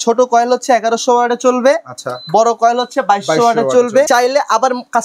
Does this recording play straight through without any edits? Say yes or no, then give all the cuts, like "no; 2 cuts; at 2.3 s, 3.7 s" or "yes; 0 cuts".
no; 1 cut; at 4.1 s